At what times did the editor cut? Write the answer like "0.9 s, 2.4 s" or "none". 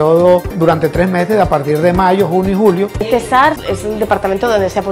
3.1 s

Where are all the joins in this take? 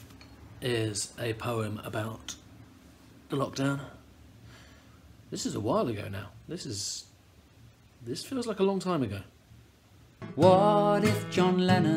10.2 s

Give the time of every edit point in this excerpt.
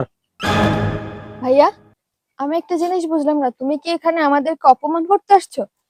none

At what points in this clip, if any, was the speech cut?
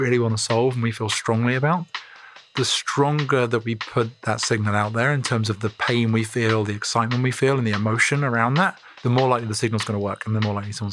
4.0 s, 8.9 s

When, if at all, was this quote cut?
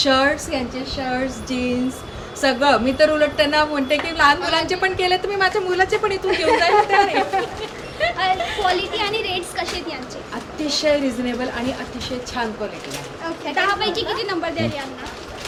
none

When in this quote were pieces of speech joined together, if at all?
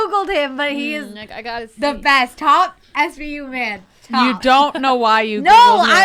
none

